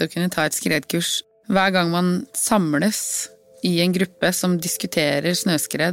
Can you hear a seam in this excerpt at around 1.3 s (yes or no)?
yes